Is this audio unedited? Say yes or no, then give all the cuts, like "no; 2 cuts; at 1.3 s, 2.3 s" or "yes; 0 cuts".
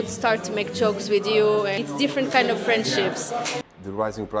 no; 2 cuts; at 1.8 s, 3.6 s